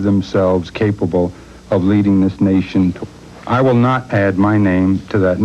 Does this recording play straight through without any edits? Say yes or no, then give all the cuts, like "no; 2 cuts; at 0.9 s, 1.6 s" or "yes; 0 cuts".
no; 1 cut; at 3.0 s